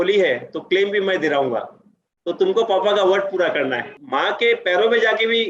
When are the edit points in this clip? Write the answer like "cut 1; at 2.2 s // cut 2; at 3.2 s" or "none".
cut 1; at 3.9 s

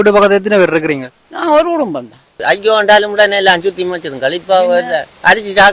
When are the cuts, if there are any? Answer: cut 1; at 2.4 s

